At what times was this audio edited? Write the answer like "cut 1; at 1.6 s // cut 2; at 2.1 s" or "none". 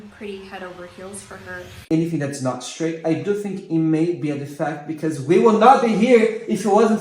cut 1; at 1.8 s